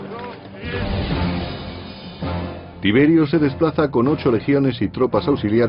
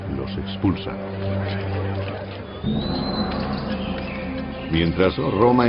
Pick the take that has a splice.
first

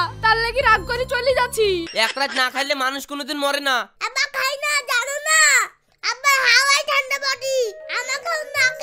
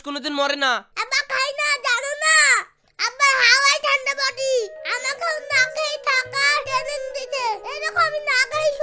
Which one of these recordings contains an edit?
first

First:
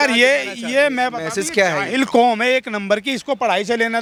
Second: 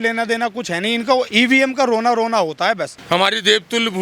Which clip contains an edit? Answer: second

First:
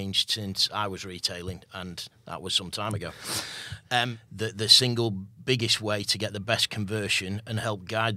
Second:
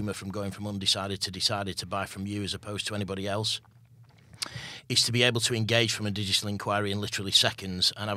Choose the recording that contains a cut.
first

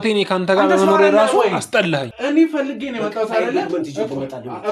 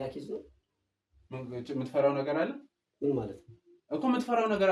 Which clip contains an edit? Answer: first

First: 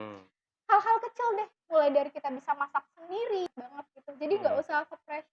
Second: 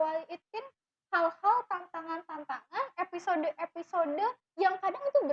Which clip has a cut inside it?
first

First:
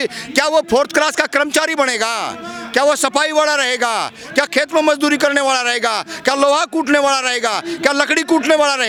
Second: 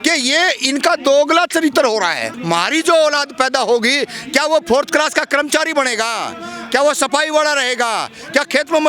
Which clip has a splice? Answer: second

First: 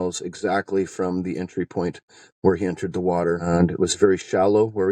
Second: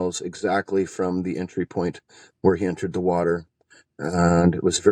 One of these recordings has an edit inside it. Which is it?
first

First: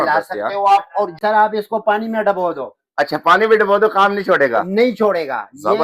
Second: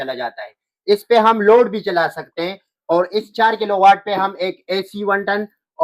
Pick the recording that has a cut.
first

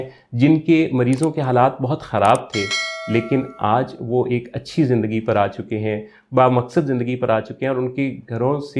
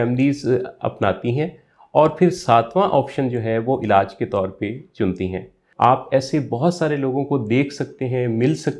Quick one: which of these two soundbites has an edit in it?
second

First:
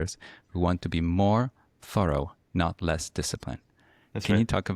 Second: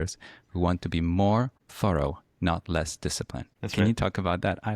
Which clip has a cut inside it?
second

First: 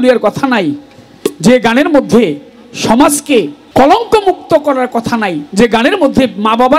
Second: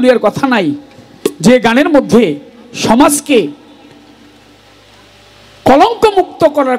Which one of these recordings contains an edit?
first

